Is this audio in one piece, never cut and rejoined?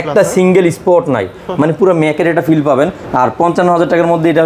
yes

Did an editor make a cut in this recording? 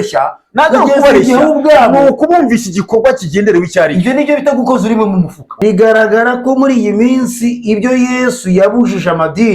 yes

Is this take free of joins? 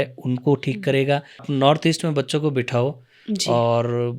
no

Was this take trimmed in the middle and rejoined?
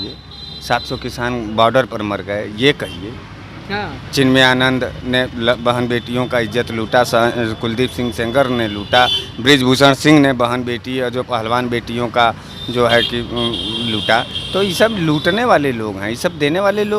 no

